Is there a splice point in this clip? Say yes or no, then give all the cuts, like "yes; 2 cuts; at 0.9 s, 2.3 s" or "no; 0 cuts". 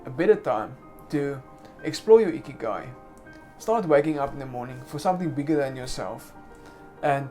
no; 0 cuts